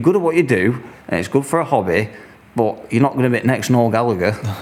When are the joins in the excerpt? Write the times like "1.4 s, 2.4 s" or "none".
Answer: none